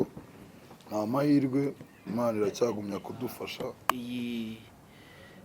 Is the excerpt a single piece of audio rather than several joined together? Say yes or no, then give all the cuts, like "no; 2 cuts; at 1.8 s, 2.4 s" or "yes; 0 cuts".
no; 1 cut; at 3.8 s